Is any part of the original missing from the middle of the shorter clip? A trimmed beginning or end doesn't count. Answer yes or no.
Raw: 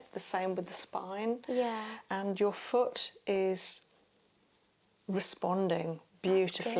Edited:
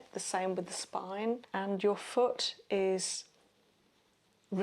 yes